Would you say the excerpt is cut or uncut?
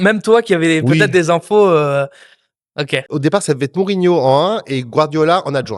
cut